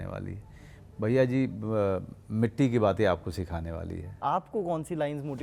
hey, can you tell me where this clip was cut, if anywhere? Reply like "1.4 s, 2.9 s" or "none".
4.1 s